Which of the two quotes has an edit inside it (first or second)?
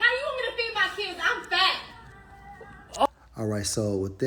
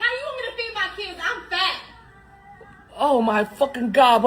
second